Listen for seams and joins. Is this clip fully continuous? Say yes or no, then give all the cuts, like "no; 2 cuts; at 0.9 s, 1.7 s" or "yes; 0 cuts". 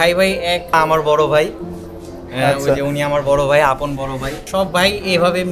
no; 2 cuts; at 0.7 s, 4.3 s